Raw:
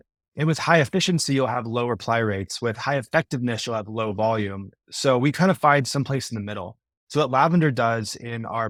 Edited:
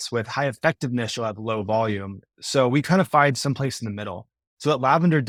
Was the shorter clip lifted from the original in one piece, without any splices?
yes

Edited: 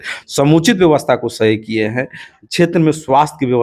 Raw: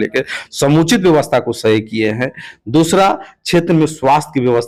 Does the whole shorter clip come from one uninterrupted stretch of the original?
no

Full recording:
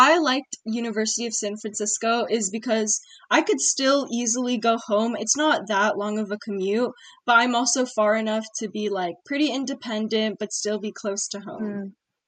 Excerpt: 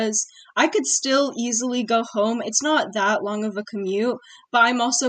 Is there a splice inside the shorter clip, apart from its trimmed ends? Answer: no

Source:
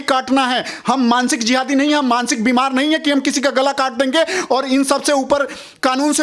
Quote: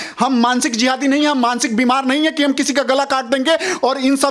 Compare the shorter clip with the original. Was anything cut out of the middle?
no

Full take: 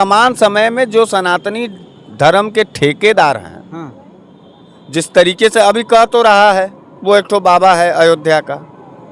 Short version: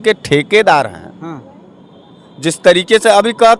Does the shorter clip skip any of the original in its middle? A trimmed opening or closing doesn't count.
no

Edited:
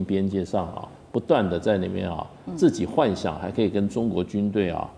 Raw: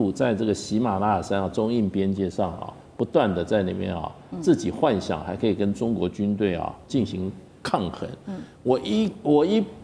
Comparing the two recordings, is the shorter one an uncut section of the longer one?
yes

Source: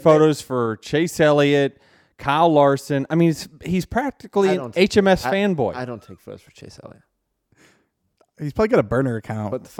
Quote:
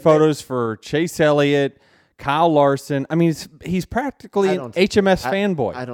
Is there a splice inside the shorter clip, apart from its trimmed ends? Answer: no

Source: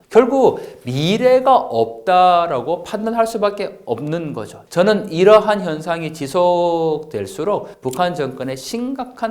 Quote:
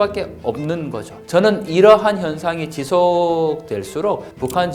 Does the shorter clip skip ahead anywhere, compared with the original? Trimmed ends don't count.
no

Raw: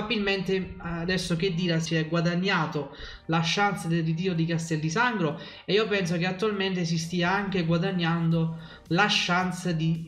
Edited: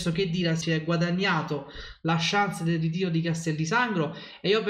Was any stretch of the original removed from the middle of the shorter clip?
no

